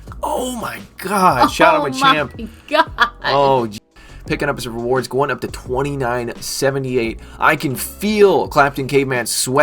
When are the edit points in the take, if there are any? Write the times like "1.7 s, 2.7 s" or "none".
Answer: 3.9 s

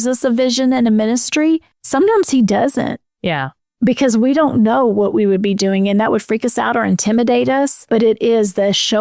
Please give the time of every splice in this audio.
1.8 s, 7.8 s

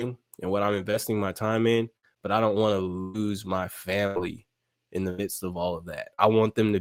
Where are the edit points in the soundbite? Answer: none

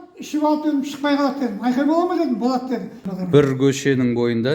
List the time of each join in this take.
3.0 s

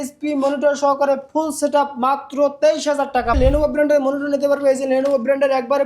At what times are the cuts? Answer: 3.4 s

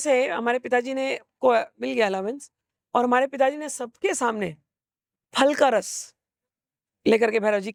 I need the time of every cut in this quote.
none

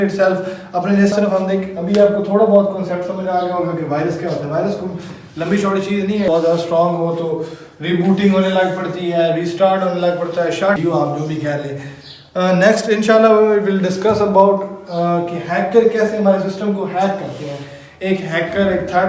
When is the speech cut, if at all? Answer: 1.1 s, 6.3 s, 10.8 s

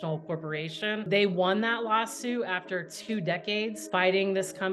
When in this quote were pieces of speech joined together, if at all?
1.1 s, 3.8 s

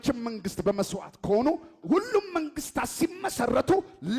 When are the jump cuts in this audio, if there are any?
none

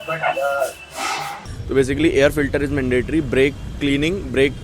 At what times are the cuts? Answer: 1.5 s

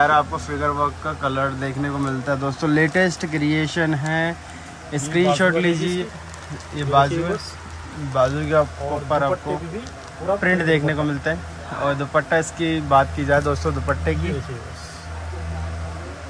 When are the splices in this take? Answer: none

